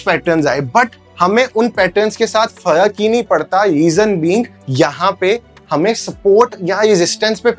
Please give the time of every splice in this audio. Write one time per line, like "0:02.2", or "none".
none